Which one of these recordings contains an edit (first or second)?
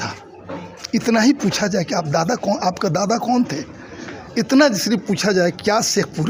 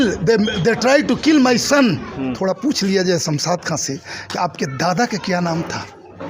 second